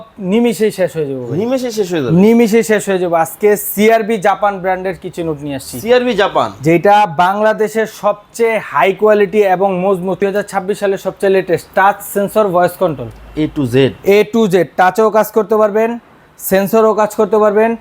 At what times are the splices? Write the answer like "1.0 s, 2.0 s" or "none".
10.2 s